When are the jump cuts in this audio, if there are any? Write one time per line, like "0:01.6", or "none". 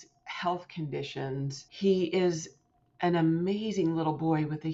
0:01.6